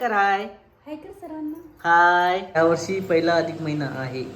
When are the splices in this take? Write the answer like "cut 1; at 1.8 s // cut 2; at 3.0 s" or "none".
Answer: cut 1; at 2.6 s